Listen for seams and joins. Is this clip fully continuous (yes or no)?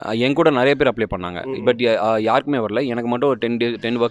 yes